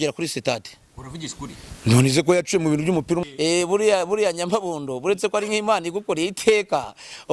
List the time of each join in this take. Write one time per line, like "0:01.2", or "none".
0:03.2